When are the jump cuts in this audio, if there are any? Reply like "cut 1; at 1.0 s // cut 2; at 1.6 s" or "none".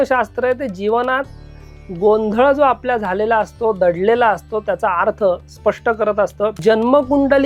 cut 1; at 6.6 s